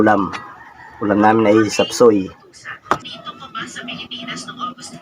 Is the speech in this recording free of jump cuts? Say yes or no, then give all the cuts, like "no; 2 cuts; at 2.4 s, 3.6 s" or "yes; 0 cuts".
no; 1 cut; at 3.1 s